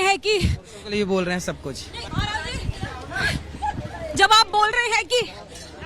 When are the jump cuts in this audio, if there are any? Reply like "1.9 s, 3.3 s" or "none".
2.0 s